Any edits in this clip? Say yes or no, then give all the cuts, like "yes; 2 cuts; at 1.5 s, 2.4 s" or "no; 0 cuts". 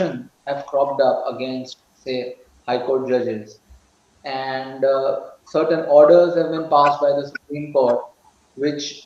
no; 0 cuts